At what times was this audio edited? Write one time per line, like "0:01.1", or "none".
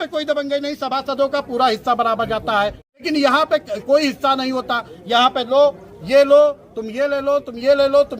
0:03.0